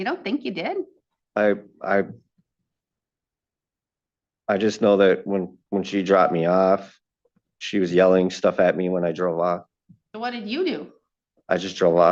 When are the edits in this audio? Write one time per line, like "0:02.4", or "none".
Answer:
none